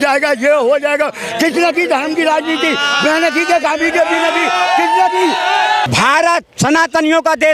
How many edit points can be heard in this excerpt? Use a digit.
1